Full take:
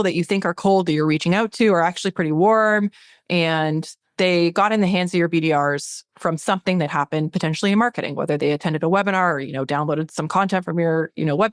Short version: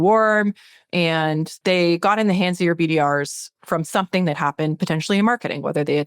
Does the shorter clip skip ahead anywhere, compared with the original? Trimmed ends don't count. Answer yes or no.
yes